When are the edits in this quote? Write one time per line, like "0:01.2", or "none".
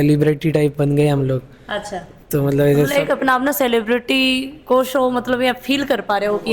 none